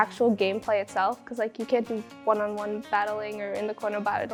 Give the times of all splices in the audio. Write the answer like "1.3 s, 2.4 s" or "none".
none